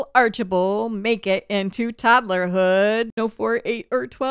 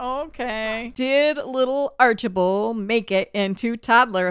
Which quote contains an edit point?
second; 1 cut; at 0.9 s

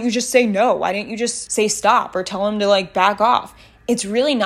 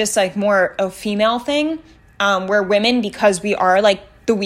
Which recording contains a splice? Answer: first; 1 cut; at 1.4 s

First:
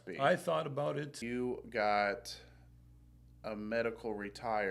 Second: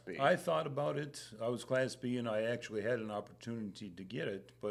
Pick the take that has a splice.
first; 1 cut; at 1.2 s

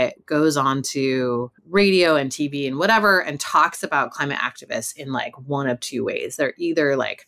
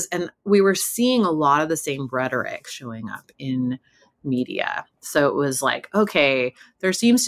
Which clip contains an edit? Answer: first; 1 cut; at 1.6 s

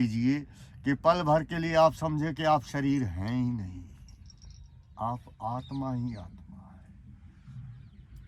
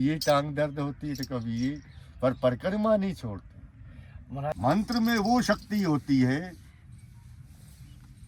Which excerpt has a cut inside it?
second; 1 cut; at 4.5 s

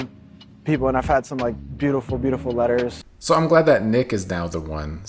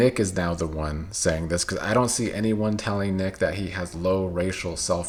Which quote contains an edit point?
first; 1 cut; at 3.0 s

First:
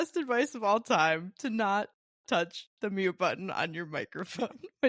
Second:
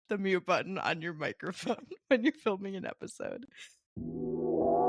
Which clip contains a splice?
second; 1 cut; at 3.8 s

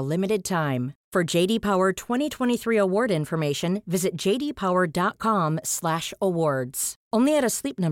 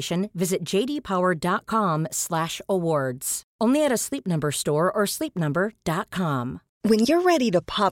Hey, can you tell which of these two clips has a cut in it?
second; 1 cut; at 6.7 s

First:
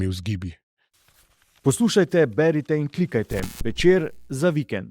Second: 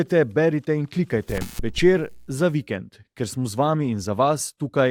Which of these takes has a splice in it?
first; 1 cut; at 1.1 s

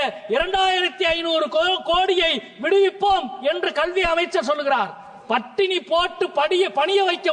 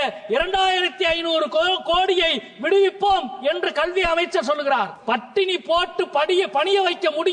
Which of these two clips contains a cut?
second; 1 cut; at 5.0 s

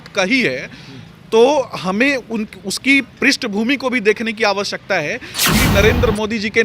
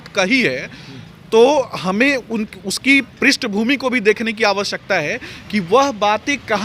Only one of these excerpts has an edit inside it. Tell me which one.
first; 1 cut; at 5.6 s

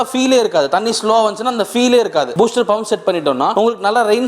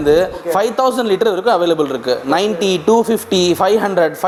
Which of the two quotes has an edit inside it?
first; 2 cuts; at 2.3 s, 3.5 s

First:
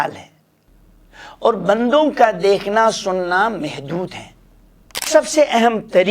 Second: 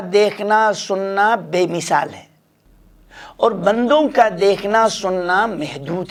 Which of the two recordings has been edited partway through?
first; 1 cut; at 5.0 s

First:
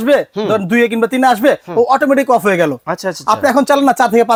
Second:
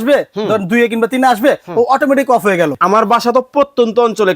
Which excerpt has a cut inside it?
second; 1 cut; at 2.8 s

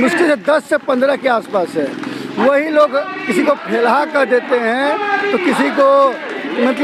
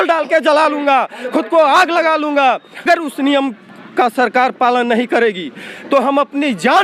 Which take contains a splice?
second; 1 cut; at 2.9 s

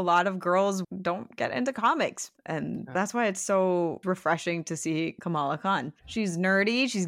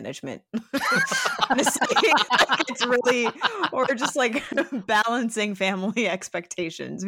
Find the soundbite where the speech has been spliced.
first; 5 cuts; at 0.8 s, 2.4 s, 4.0 s, 5.2 s, 6.0 s

